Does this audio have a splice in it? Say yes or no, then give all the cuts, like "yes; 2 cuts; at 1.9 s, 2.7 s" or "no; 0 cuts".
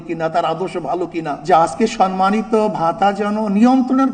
yes; 1 cut; at 1.4 s